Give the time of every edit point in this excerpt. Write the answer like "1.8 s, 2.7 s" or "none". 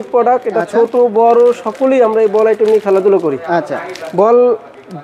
none